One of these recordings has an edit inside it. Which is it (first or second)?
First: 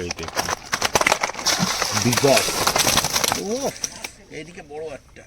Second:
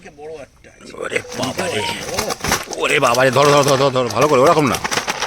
first